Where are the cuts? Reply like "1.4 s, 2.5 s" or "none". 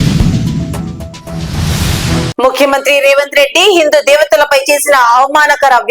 2.3 s